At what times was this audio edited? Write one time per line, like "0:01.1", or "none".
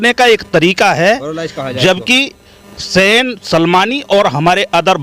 none